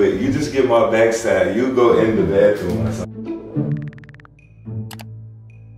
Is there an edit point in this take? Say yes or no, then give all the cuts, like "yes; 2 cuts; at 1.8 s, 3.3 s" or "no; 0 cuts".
yes; 1 cut; at 3.0 s